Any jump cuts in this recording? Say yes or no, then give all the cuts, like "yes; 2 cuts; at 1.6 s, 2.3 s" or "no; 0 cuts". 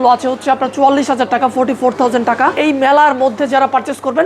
yes; 1 cut; at 2.6 s